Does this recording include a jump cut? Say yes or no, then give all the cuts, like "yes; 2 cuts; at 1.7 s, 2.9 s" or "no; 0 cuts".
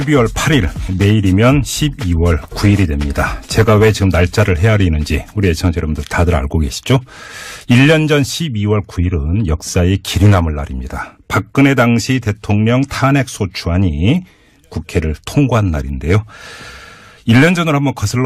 no; 0 cuts